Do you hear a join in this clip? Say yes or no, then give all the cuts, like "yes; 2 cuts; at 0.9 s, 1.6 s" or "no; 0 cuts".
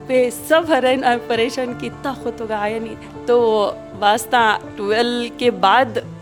no; 0 cuts